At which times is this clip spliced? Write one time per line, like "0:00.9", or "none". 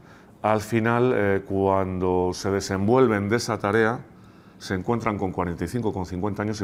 none